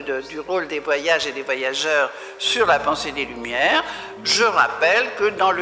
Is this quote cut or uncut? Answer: uncut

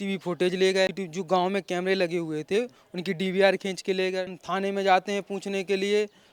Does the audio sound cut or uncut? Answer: cut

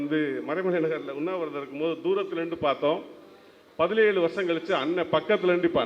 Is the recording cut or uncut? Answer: uncut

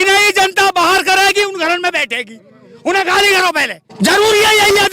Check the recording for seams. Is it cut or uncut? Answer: cut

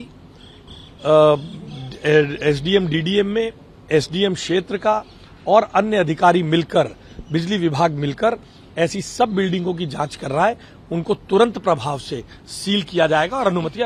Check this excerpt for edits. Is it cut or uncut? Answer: uncut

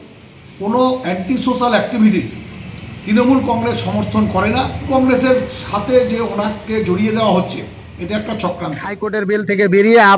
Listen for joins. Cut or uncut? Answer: cut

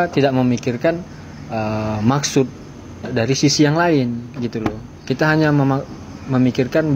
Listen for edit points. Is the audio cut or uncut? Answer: uncut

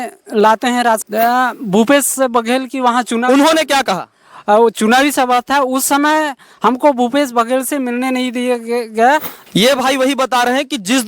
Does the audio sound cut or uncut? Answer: cut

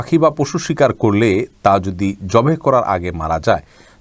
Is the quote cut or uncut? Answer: uncut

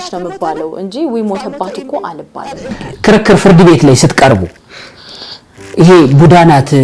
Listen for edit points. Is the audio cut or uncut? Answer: cut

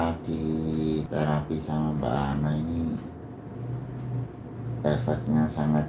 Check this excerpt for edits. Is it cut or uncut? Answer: cut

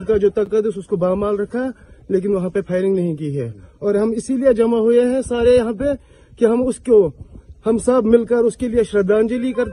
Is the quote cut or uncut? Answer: uncut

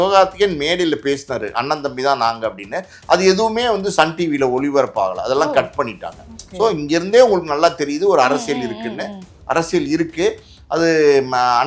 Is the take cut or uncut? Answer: uncut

